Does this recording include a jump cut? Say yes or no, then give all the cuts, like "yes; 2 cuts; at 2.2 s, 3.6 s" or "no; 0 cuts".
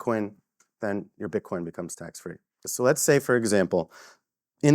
yes; 1 cut; at 2.6 s